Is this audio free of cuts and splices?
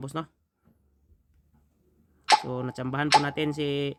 yes; 0 cuts

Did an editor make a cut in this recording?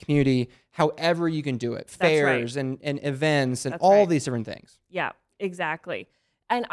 no; 0 cuts

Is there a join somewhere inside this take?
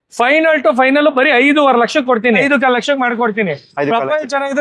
yes; 1 cut; at 2.4 s

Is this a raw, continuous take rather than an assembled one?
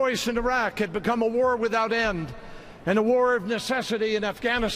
no; 1 cut; at 2.5 s

